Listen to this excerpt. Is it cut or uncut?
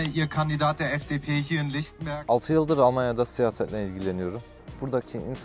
cut